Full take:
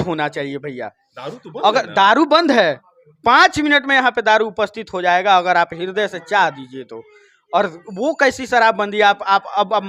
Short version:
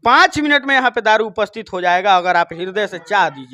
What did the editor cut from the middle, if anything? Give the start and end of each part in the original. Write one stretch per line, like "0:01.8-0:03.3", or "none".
none